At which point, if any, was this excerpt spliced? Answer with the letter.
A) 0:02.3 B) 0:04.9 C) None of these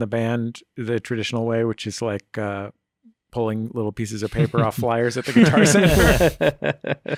C